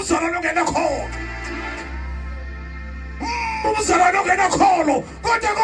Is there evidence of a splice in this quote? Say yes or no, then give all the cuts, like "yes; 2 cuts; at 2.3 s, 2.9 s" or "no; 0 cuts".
no; 0 cuts